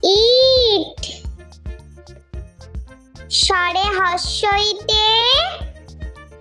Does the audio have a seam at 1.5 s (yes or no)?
yes